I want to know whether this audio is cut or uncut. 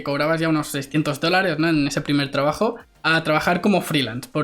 uncut